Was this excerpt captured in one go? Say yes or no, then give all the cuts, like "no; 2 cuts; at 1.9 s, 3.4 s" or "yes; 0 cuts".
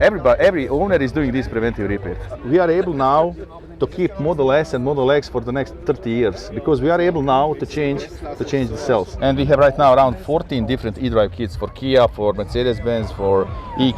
no; 2 cuts; at 2.4 s, 9.1 s